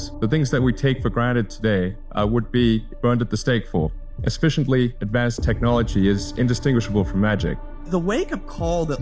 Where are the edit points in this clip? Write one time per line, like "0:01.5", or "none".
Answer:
0:02.0
0:02.9
0:04.1
0:05.0
0:07.8